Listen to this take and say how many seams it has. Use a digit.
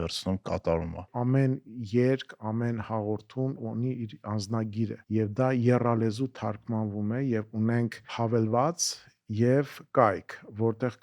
4